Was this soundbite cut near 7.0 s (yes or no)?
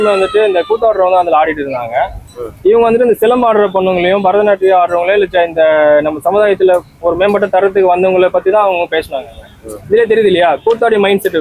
no